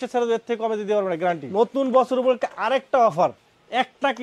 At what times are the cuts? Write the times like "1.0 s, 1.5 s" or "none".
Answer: 1.4 s